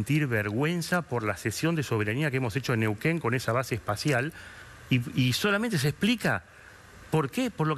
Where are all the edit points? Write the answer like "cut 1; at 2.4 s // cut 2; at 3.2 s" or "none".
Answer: none